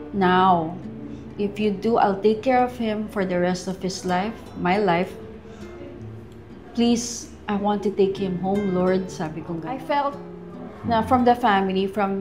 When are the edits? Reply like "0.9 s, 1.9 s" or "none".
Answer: 9.7 s